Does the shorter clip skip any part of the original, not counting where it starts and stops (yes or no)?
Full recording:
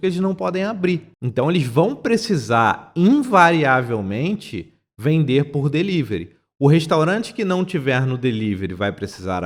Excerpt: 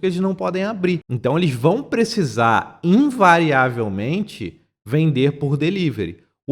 yes